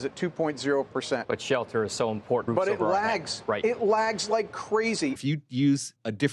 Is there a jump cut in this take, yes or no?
yes